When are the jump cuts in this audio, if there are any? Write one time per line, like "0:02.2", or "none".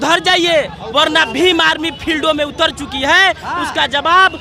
none